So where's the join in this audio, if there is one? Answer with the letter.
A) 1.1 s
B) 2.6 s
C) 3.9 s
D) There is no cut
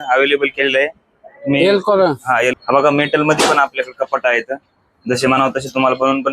B